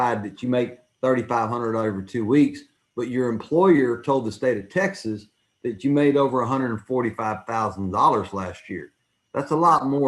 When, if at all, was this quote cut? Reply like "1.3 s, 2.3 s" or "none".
3.4 s